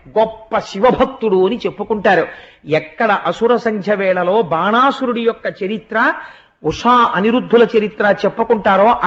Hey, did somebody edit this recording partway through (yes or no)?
no